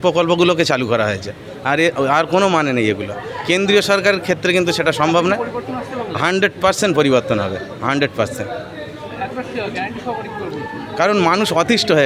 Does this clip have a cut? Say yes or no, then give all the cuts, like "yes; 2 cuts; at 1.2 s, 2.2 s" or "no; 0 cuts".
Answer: no; 0 cuts